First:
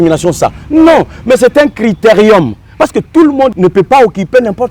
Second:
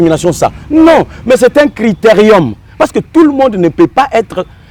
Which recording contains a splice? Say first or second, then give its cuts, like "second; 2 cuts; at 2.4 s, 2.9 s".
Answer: first; 1 cut; at 3.5 s